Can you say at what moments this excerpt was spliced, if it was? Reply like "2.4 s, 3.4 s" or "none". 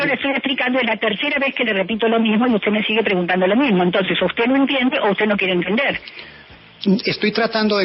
none